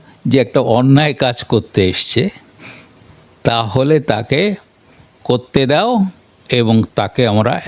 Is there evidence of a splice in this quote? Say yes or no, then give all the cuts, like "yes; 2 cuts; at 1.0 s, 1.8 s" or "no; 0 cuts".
no; 0 cuts